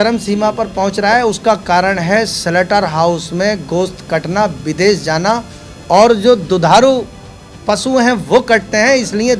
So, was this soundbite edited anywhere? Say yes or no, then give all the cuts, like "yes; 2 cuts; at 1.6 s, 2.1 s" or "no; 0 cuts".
no; 0 cuts